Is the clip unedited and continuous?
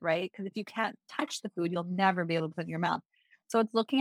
yes; 0 cuts

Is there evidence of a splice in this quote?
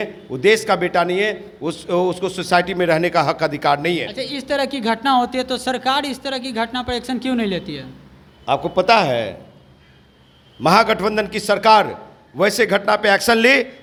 no; 0 cuts

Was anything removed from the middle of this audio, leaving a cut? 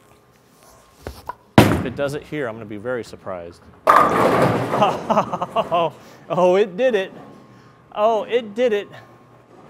no; 0 cuts

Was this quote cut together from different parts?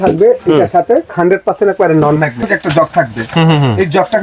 yes; 2 cuts; at 1.1 s, 2.4 s

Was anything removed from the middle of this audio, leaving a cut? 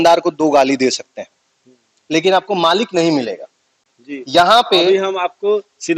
no; 0 cuts

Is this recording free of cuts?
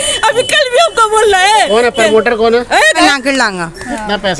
no; 1 cut; at 2.9 s

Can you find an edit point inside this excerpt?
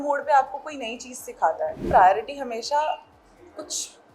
yes; 1 cut; at 1.8 s

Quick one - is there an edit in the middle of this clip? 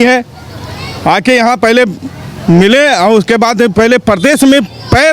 no; 0 cuts

